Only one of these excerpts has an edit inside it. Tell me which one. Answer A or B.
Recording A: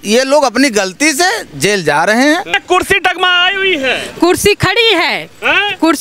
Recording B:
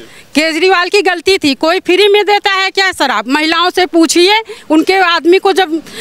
A